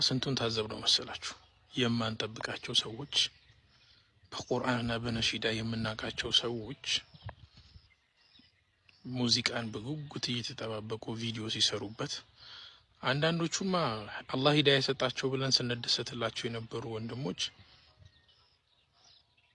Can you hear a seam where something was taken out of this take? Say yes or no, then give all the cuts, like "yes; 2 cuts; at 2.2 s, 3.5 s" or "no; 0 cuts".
no; 0 cuts